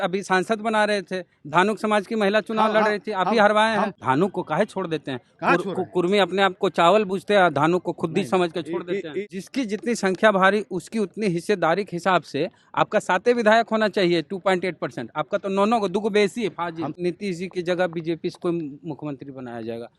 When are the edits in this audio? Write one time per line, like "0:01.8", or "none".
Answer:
0:03.9
0:09.1
0:16.9